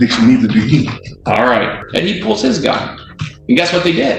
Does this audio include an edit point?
yes; 1 cut; at 1.8 s

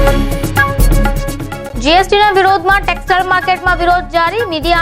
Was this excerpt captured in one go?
no; 1 cut; at 1.3 s

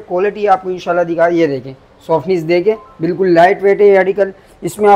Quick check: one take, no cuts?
yes; 0 cuts

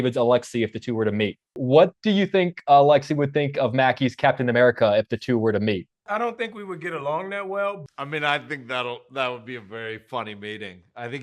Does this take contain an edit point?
yes; 3 cuts; at 1.6 s, 6.0 s, 7.8 s

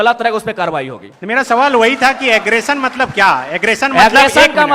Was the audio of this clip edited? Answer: no; 0 cuts

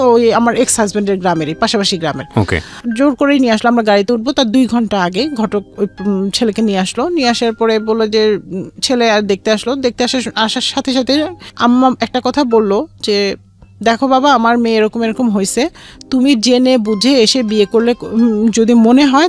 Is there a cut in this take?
no; 0 cuts

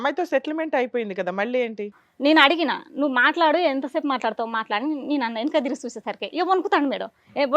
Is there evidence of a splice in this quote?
yes; 1 cut; at 2.0 s

